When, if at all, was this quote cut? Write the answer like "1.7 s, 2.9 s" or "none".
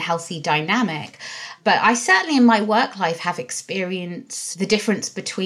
1.5 s, 4.4 s